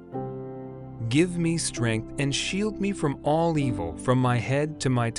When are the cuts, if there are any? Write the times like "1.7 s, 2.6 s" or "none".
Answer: 1.0 s